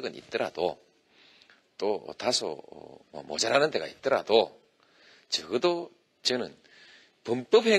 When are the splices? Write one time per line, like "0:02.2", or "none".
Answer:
0:03.9